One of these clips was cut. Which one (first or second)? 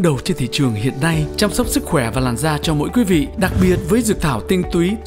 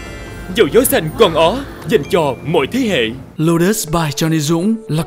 second